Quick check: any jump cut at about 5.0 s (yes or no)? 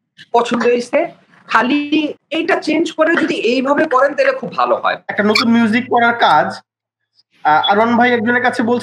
yes